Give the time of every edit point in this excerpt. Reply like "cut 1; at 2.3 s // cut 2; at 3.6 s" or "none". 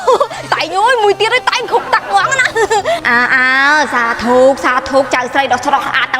none